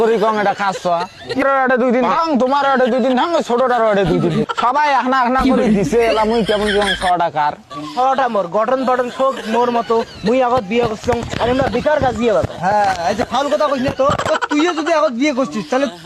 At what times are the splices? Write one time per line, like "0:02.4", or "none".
0:01.4
0:04.4